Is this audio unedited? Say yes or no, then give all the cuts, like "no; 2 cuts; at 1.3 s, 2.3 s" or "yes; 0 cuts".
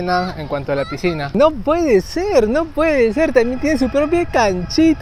no; 1 cut; at 1.3 s